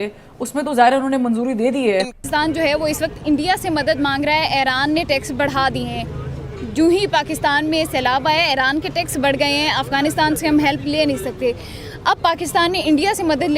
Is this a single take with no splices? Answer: no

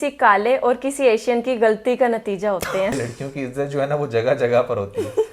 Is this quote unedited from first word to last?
no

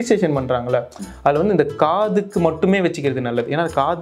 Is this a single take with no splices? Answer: yes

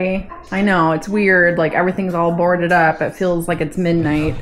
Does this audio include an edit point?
no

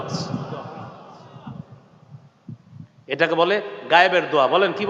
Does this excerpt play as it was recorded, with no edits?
yes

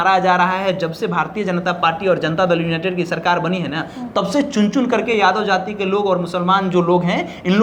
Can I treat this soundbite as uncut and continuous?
yes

